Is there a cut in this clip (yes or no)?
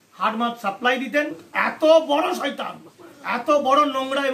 yes